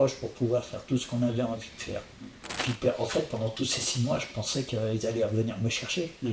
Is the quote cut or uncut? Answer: cut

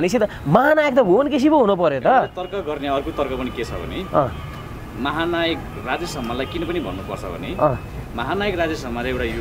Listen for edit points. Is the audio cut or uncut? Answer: uncut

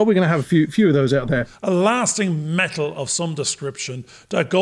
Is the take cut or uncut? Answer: cut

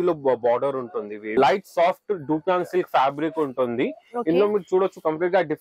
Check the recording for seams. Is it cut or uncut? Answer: cut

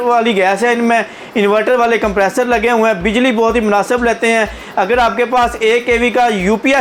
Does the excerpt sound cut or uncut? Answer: uncut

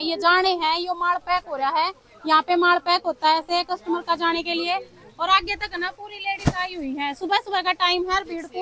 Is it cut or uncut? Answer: uncut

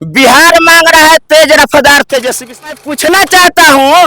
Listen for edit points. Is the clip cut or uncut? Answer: cut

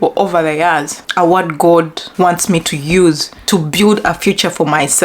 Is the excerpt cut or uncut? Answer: cut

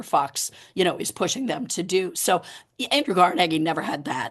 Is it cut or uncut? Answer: uncut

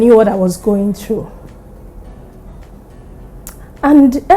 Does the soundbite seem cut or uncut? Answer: uncut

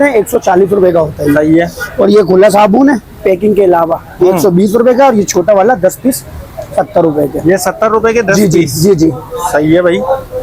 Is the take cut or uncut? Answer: uncut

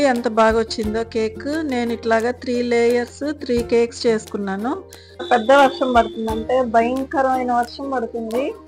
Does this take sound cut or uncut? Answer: cut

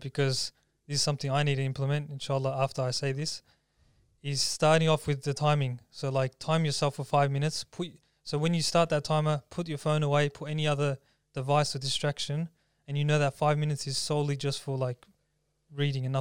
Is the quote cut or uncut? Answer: uncut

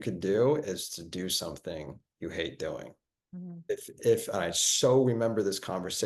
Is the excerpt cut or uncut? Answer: cut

